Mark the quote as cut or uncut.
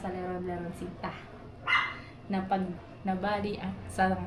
uncut